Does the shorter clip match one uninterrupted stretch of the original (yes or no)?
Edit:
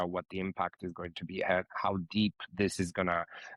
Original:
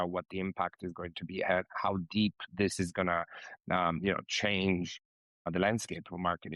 yes